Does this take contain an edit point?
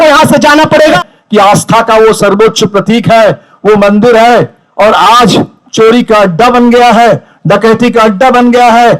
yes; 1 cut; at 1.0 s

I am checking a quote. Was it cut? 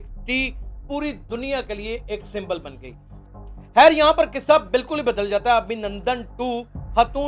yes; 1 cut; at 3.1 s

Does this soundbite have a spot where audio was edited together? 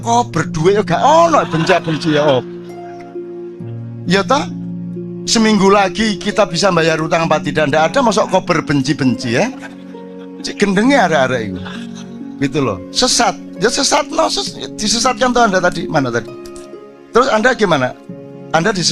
no; 0 cuts

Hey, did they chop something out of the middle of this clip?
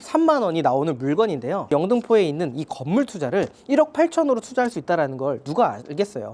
yes; 1 cut; at 1.6 s

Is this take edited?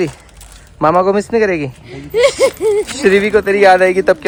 no; 0 cuts

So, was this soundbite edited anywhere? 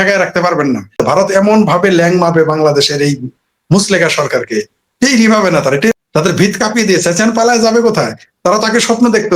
yes; 2 cuts; at 1.0 s, 6.0 s

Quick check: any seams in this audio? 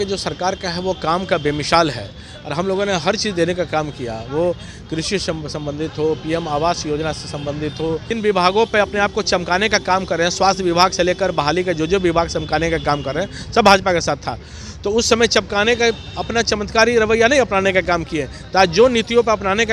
yes; 1 cut; at 8.1 s

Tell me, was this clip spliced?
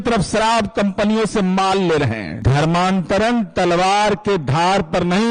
yes; 1 cut; at 2.3 s

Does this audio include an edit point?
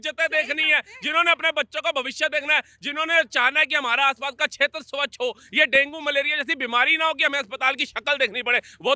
no; 0 cuts

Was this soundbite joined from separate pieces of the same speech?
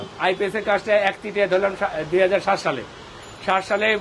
no; 0 cuts

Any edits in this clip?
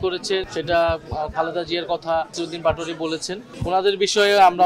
no; 0 cuts

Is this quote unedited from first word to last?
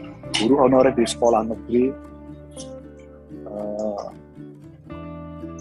yes; 0 cuts

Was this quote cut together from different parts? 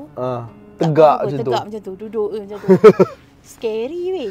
no; 0 cuts

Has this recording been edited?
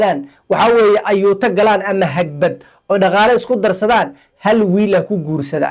no; 0 cuts

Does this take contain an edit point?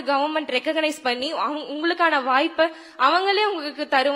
no; 0 cuts

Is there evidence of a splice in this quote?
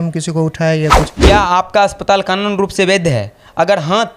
yes; 1 cut; at 1.1 s

